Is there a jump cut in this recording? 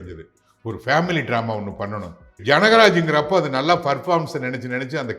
yes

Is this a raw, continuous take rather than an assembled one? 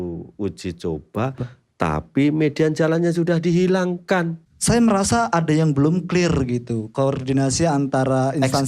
no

